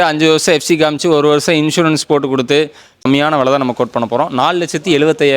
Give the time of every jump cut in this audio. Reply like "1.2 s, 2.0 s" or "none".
3.0 s